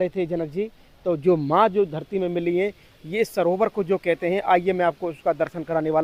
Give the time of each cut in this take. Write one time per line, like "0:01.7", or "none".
none